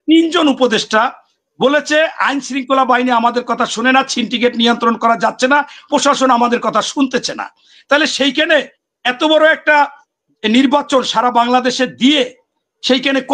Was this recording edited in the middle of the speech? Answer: no; 0 cuts

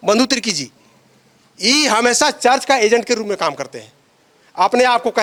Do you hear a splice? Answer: no; 0 cuts

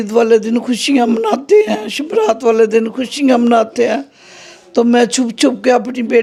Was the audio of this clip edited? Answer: no; 0 cuts

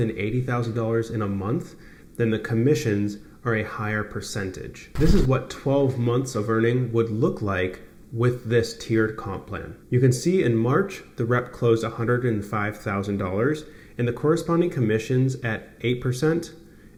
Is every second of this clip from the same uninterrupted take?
yes; 0 cuts

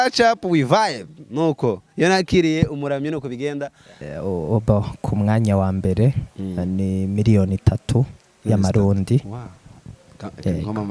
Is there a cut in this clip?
yes; 1 cut; at 4.0 s

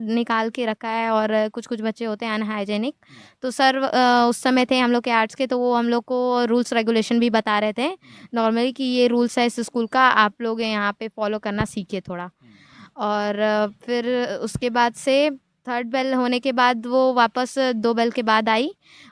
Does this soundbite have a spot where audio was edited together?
no; 0 cuts

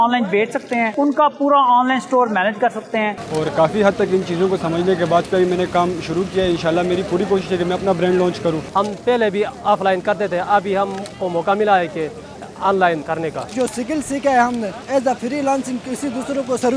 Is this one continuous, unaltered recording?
no; 6 cuts; at 0.9 s, 3.2 s, 5.2 s, 8.6 s, 13.5 s, 14.8 s

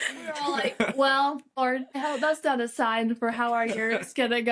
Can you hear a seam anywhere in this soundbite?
yes; 1 cut; at 1.6 s

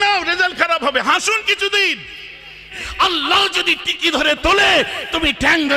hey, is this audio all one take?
no; 1 cut; at 2.7 s

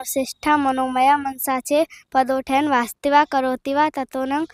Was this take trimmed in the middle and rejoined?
no; 0 cuts

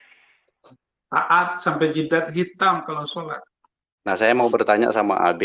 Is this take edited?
yes; 1 cut; at 4.0 s

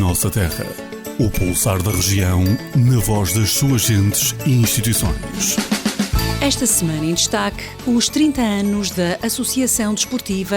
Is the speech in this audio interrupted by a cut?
yes; 1 cut; at 1.0 s

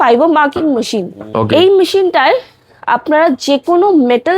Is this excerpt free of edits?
no; 1 cut; at 1.2 s

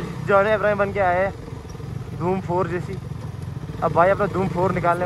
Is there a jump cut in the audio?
no; 0 cuts

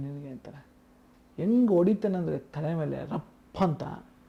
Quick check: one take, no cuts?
yes; 0 cuts

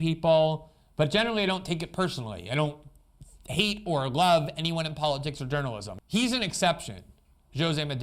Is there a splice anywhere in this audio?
yes; 1 cut; at 5.9 s

